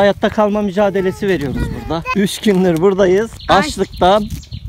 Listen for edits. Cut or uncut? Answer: cut